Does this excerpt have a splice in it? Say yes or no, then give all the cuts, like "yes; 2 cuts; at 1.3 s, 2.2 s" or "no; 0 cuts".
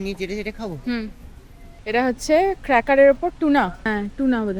no; 0 cuts